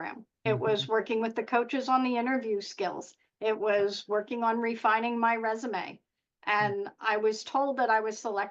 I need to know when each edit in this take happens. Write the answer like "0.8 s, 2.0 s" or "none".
none